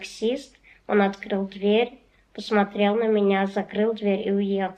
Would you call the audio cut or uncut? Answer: uncut